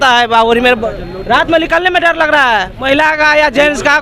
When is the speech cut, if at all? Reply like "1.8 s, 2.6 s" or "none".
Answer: 2.7 s